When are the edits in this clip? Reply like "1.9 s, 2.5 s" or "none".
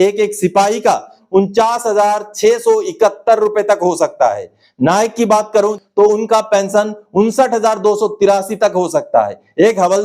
1.2 s, 5.8 s